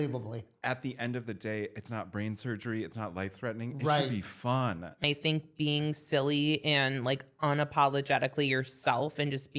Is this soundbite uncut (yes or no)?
no